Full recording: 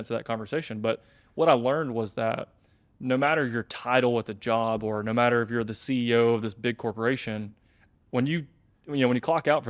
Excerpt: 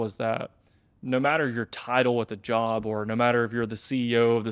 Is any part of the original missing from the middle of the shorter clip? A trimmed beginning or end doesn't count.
no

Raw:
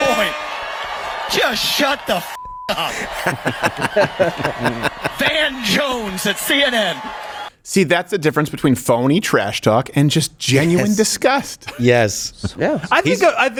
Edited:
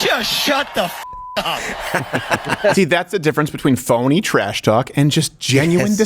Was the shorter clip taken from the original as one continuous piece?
no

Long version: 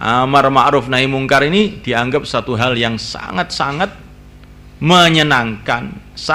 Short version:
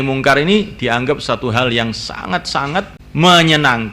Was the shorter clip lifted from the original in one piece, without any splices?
no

